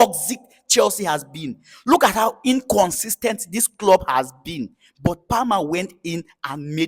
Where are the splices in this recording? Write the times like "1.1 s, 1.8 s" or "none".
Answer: none

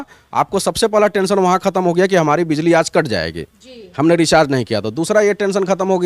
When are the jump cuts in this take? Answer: none

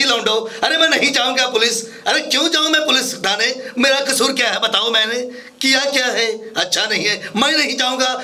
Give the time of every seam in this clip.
none

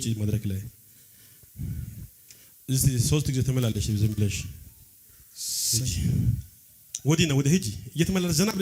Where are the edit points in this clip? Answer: none

